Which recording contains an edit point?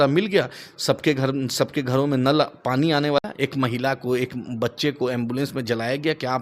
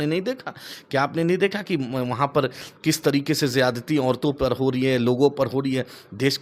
first; 1 cut; at 3.2 s

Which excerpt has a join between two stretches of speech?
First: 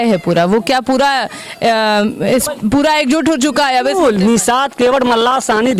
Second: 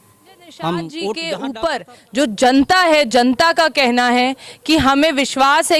second; 1 cut; at 1.3 s

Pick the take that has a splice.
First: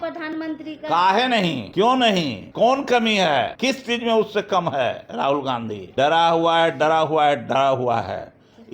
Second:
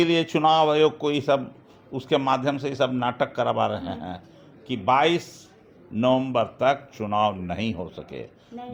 first; 4 cuts; at 1.6 s, 2.4 s, 3.5 s, 5.8 s

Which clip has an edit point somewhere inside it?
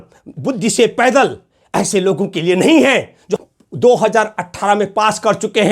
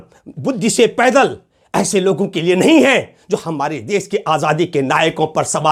first; 1 cut; at 3.4 s

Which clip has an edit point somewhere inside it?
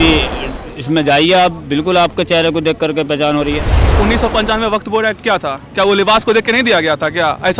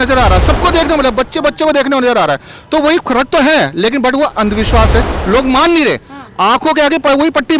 first; 1 cut; at 3.8 s

